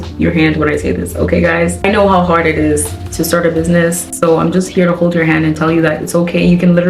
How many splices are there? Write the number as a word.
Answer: two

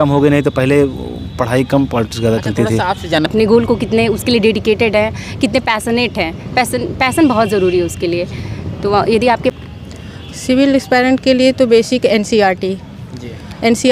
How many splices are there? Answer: two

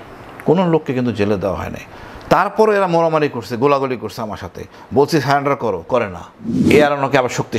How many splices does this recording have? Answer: one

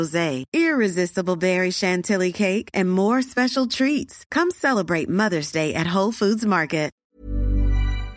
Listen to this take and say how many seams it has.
one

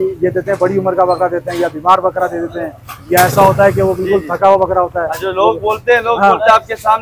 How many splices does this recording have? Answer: zero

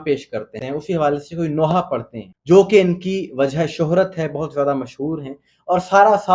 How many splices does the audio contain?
zero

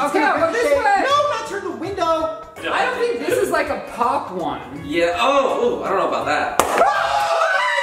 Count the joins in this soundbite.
one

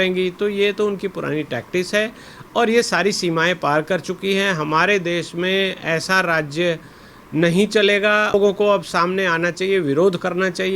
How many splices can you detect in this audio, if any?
one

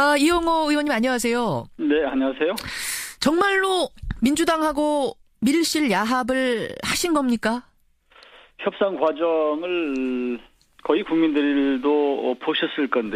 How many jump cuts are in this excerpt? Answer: zero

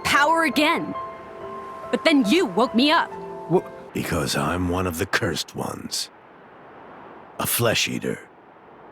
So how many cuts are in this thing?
one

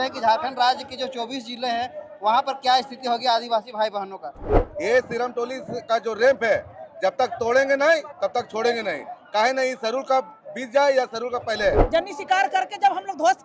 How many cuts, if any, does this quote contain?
two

